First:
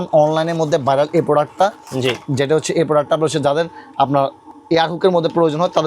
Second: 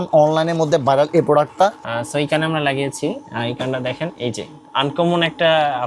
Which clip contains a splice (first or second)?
second